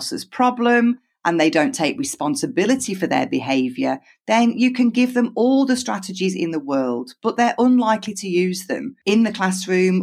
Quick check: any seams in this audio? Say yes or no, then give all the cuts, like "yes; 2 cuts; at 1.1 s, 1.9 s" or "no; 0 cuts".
no; 0 cuts